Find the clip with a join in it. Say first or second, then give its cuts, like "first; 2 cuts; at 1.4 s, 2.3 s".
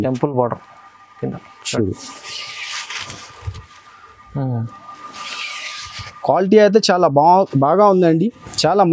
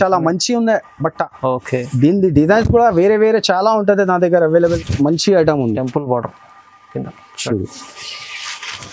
second; 1 cut; at 4.8 s